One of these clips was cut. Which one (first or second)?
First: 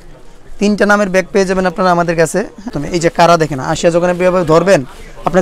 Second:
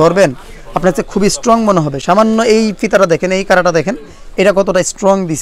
first